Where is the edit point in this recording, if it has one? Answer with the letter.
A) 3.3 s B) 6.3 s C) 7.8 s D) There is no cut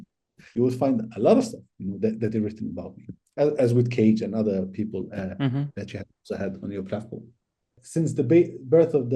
C